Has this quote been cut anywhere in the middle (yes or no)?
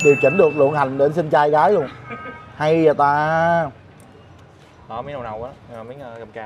no